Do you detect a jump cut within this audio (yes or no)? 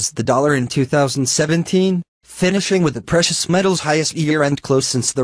yes